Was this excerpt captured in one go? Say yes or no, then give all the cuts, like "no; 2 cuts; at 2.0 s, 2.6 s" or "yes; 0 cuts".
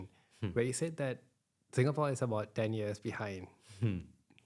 yes; 0 cuts